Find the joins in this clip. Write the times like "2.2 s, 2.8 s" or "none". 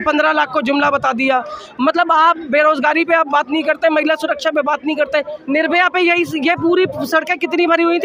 none